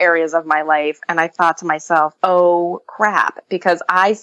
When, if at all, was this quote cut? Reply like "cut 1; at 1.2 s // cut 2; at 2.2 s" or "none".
none